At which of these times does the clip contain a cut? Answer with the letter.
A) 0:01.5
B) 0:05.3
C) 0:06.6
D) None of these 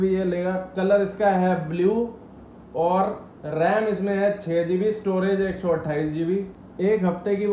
C